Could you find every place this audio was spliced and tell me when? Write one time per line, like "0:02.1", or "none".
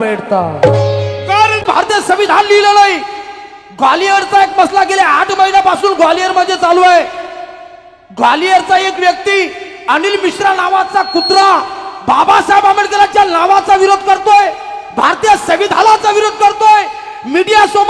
0:01.6